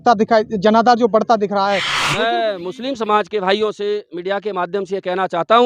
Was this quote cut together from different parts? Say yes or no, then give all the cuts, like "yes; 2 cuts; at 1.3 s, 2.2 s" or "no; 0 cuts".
yes; 1 cut; at 2.0 s